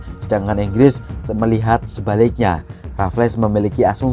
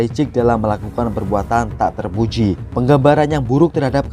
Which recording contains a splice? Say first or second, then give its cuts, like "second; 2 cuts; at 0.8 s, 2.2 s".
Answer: second; 1 cut; at 2.6 s